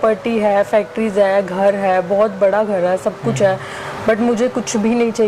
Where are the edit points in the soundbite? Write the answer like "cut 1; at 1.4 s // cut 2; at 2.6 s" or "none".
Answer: none

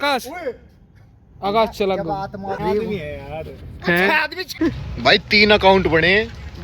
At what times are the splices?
cut 1; at 2.6 s // cut 2; at 4.4 s

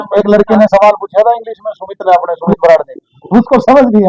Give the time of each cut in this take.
none

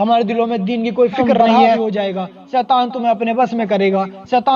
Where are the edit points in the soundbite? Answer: cut 1; at 1.6 s

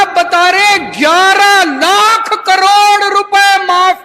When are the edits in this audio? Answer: none

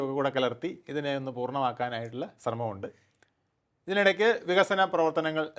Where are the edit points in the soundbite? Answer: none

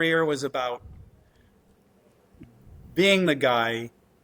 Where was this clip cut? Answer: none

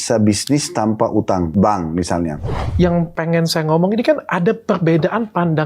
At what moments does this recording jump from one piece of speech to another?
cut 1; at 1.5 s // cut 2; at 2.6 s

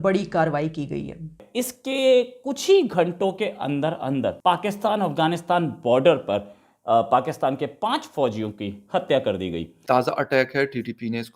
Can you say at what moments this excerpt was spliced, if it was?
cut 1; at 1.4 s // cut 2; at 9.7 s

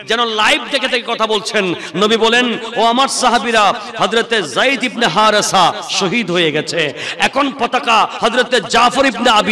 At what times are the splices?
cut 1; at 8.1 s

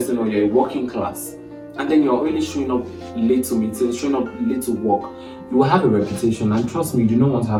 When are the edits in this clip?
none

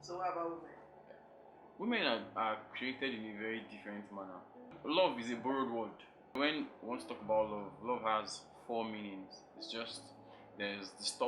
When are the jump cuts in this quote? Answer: cut 1; at 4.8 s // cut 2; at 6.4 s

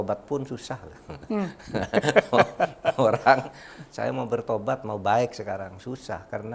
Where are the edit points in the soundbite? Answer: none

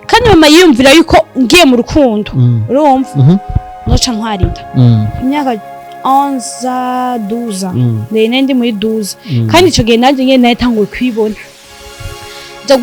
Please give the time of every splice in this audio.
cut 1; at 5.1 s

